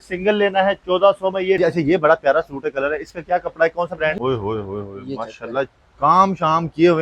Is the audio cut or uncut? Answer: cut